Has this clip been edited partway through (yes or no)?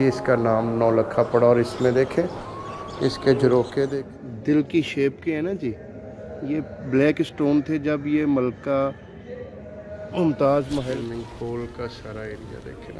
yes